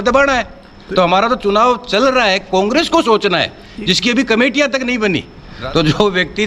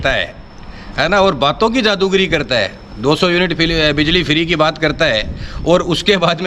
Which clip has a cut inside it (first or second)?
first